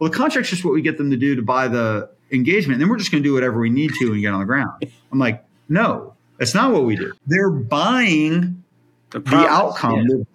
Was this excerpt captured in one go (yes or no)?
no